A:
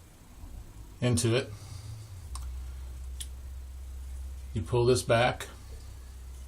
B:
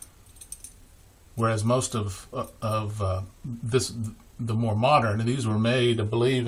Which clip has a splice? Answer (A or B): A